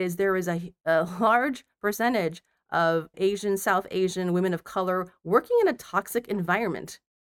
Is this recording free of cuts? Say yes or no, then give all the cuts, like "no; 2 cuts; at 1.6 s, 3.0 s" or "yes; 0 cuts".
no; 1 cut; at 3.1 s